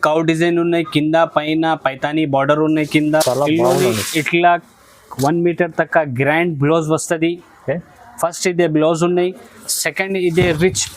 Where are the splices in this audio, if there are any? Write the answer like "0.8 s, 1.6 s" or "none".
3.2 s